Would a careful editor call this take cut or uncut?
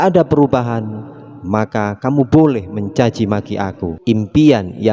cut